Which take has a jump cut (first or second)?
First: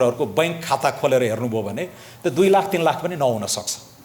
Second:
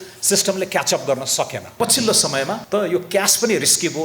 second